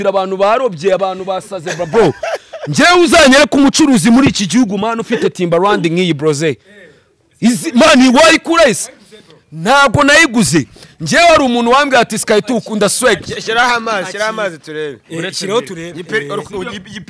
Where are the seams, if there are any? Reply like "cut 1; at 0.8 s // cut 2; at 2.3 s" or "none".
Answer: none